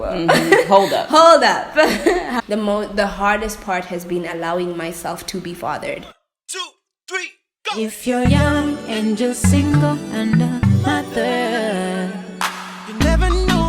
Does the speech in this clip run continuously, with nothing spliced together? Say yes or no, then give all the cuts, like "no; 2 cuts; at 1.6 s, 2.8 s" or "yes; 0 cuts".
no; 2 cuts; at 2.3 s, 6.1 s